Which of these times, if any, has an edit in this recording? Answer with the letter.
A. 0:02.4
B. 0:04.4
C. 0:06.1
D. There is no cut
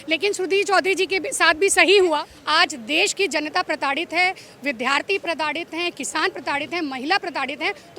A